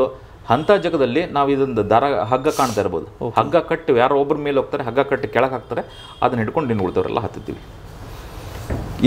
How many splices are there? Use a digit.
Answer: 0